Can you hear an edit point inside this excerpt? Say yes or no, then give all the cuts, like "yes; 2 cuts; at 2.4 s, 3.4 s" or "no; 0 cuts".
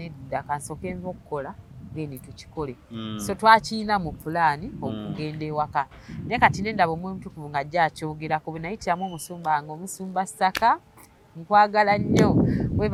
no; 0 cuts